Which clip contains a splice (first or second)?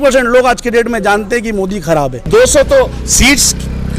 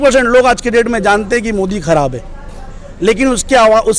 first